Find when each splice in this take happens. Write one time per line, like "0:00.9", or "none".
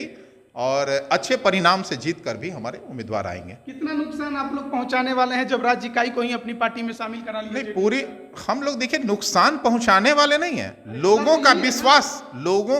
none

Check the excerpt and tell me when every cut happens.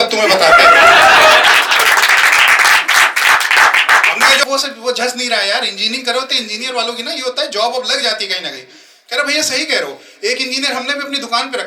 0:04.4

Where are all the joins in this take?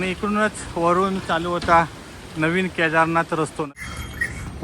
0:03.7

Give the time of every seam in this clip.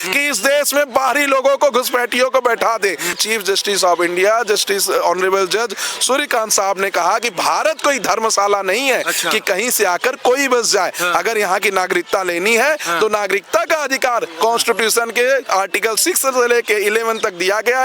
0:03.2

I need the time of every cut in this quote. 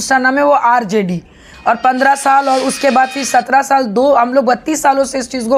none

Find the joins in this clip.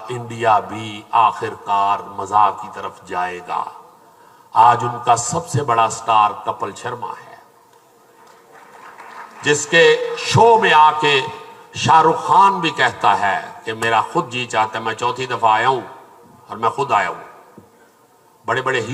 none

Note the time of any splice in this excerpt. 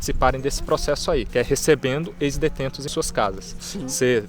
0:01.3

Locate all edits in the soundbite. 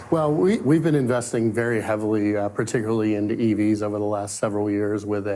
none

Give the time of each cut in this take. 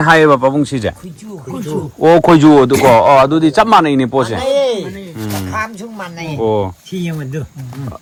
none

